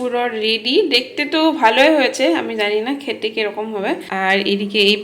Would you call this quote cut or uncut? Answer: cut